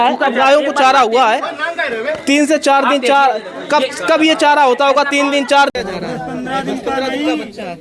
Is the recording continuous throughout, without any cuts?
no; 1 cut; at 5.7 s

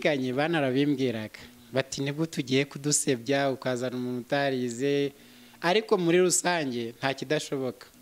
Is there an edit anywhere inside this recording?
no; 0 cuts

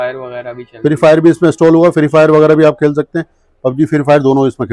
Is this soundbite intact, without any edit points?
yes; 0 cuts

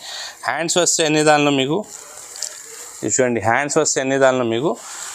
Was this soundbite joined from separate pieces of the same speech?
no; 0 cuts

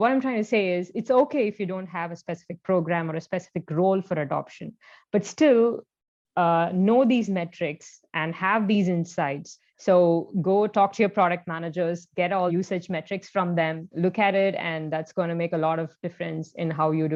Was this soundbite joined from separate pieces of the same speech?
no; 0 cuts

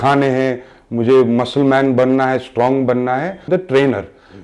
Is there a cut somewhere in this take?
yes; 1 cut; at 3.5 s

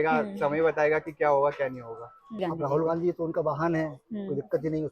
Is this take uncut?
no; 1 cut; at 2.4 s

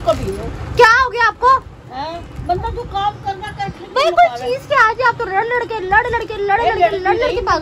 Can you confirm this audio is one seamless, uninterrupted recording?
yes; 0 cuts

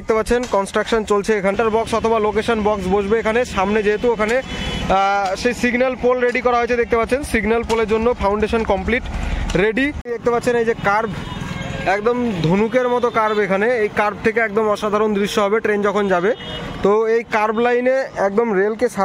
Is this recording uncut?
no; 2 cuts; at 1.5 s, 10.1 s

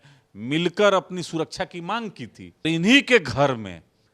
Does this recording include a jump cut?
yes; 1 cut; at 2.6 s

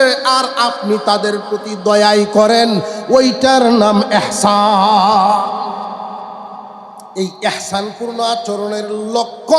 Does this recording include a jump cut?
yes; 1 cut; at 7.0 s

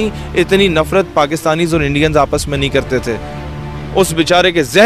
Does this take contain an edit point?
no; 0 cuts

